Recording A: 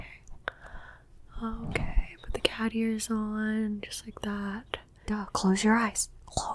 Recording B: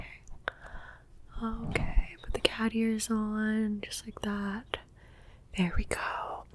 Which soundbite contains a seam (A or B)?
A